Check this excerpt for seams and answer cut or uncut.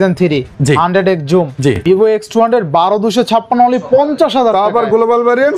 cut